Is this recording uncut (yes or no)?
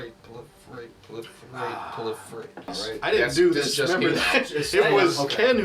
no